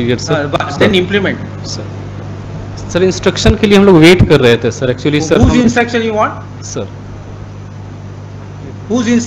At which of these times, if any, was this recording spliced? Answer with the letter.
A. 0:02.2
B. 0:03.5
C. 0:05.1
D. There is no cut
A